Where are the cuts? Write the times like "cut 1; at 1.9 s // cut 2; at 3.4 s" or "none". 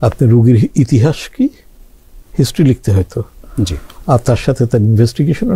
none

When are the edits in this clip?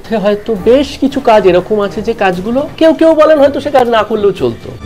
cut 1; at 2.7 s

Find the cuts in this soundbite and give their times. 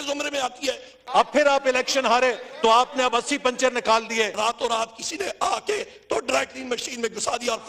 cut 1; at 1.0 s // cut 2; at 4.3 s

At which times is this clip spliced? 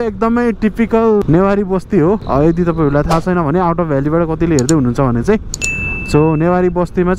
cut 1; at 1.2 s // cut 2; at 2.2 s

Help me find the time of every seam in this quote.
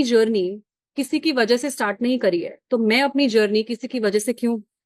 none

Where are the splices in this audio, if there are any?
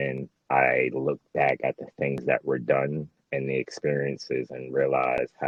none

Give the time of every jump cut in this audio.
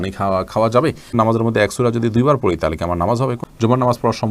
cut 1; at 1.1 s // cut 2; at 3.4 s

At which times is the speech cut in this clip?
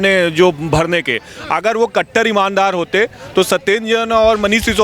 none

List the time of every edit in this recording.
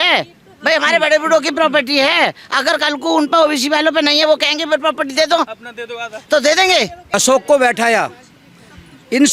cut 1; at 7.1 s

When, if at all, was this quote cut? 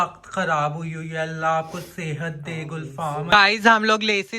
cut 1; at 3.3 s

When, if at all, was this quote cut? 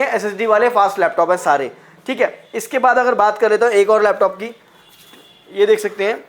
none

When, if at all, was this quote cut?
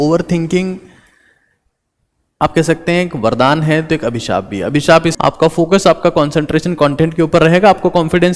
cut 1; at 5.1 s

